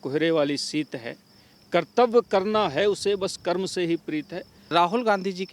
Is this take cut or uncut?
cut